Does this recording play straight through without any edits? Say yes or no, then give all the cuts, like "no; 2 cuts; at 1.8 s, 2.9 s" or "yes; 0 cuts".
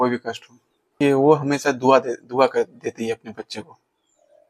no; 1 cut; at 0.9 s